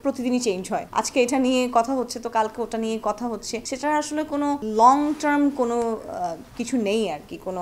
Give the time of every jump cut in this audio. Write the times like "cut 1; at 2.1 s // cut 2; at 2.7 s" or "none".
none